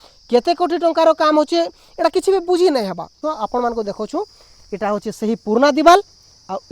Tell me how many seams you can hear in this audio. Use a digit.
1